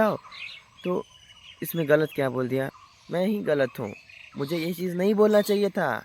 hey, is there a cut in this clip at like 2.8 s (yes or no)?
yes